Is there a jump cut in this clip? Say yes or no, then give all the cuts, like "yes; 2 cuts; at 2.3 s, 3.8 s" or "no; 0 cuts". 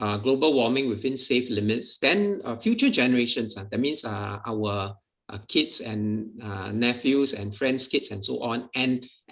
no; 0 cuts